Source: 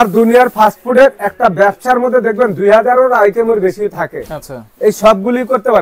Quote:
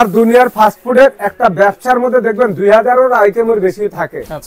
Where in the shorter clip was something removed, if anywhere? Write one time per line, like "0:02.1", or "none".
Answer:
none